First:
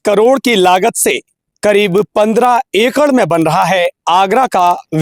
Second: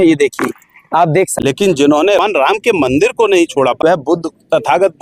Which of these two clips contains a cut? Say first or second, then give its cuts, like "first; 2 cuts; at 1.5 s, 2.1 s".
second; 3 cuts; at 1.3 s, 2.2 s, 3.8 s